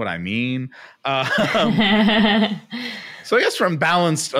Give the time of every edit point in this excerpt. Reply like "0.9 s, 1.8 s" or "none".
none